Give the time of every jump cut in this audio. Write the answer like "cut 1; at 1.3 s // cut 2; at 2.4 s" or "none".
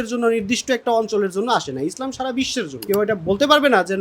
cut 1; at 2.8 s